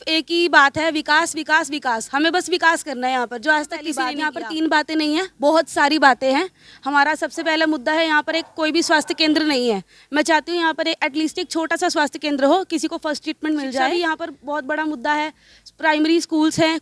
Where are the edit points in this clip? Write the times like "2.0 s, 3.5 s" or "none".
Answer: 4.1 s, 13.9 s